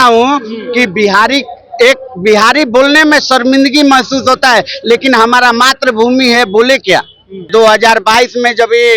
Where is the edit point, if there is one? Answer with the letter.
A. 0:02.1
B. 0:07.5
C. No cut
B